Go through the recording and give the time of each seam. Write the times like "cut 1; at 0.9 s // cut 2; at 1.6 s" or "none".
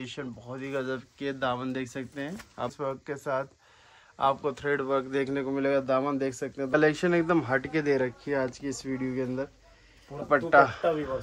cut 1; at 2.7 s // cut 2; at 6.7 s // cut 3; at 10.2 s